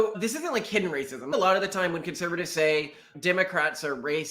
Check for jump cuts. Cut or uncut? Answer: cut